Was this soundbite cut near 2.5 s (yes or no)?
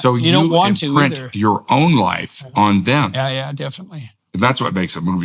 no